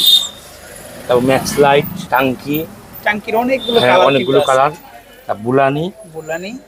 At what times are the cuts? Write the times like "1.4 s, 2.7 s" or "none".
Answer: 2.0 s